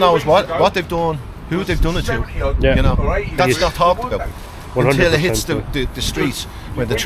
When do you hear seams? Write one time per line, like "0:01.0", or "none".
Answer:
none